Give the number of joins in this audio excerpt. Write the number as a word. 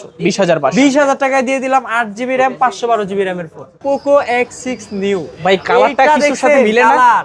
one